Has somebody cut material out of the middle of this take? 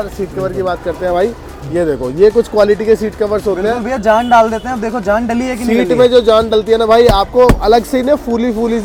no; 0 cuts

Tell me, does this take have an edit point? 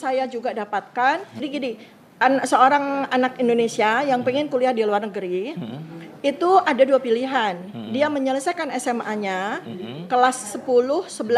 yes; 1 cut; at 1.5 s

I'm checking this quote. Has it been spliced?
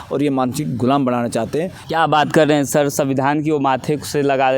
yes; 1 cut; at 1.8 s

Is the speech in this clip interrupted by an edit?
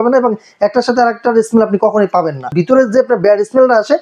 yes; 1 cut; at 2.5 s

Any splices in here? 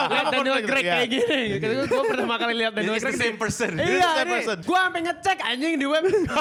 no; 0 cuts

